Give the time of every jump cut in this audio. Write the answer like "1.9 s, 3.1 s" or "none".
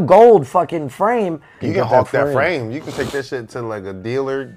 1.5 s